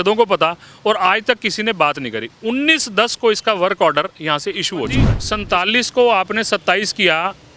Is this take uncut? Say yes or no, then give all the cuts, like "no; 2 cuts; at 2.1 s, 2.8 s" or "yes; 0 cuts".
no; 1 cut; at 5.1 s